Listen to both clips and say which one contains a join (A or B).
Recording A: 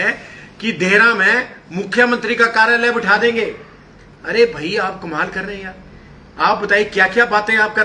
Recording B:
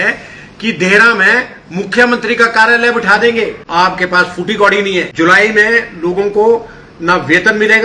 B